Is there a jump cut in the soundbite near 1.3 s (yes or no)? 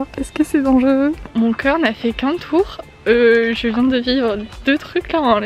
yes